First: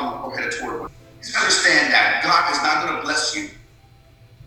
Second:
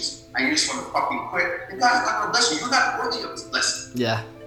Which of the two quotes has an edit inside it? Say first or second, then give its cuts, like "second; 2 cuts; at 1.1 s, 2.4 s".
first; 1 cut; at 1.0 s